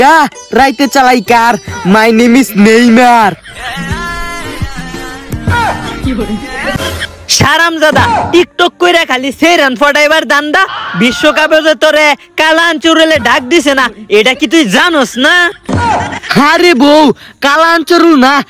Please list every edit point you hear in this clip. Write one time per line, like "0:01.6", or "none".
0:06.8